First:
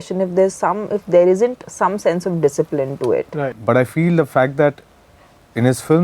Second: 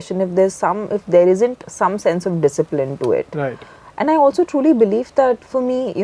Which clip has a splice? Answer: first; 1 cut; at 3.6 s

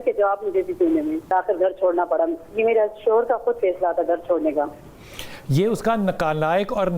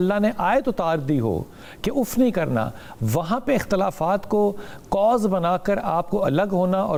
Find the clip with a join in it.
first; 1 cut; at 1.3 s

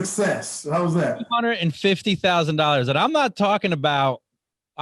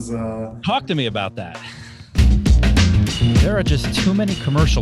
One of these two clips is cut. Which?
second; 1 cut; at 2.2 s

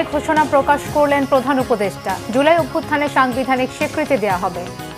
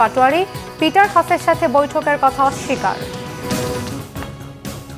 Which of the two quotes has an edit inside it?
second; 1 cut; at 3.9 s

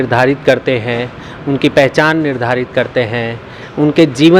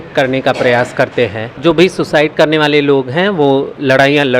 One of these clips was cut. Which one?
second; 1 cut; at 1.6 s

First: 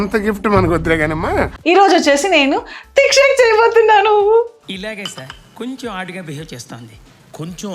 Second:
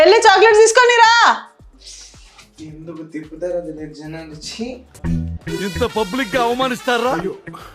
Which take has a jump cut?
first; 1 cut; at 1.6 s

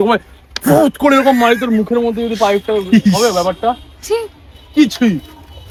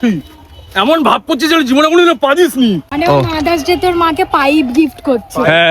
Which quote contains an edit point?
second; 1 cut; at 2.9 s

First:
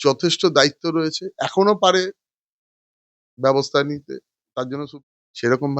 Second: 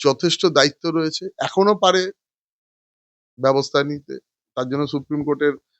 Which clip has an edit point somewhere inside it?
first; 1 cut; at 4.9 s

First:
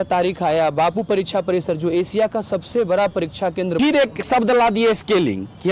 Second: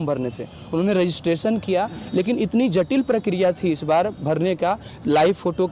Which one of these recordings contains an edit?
first; 1 cut; at 3.7 s

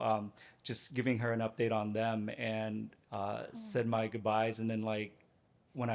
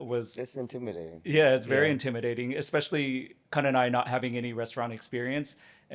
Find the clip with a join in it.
first; 1 cut; at 3.0 s

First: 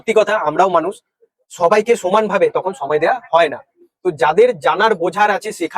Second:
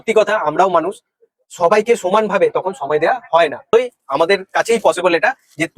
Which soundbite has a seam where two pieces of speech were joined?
second; 1 cut; at 3.7 s

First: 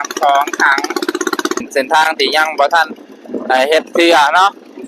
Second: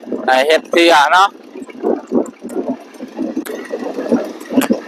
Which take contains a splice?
first; 1 cut; at 1.7 s

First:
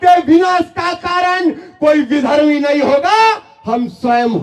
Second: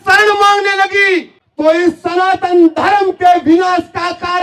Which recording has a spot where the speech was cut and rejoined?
second; 1 cut; at 1.4 s

